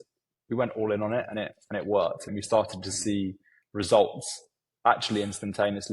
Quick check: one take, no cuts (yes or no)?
no